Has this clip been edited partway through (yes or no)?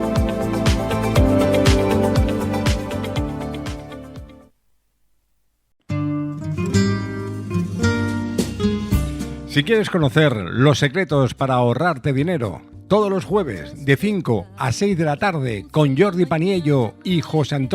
yes